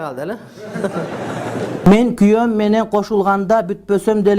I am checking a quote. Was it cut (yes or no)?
yes